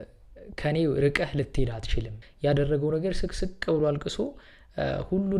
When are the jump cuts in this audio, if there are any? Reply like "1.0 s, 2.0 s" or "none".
2.2 s